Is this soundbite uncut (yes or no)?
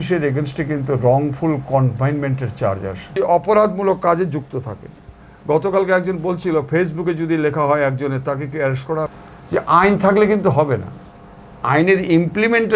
no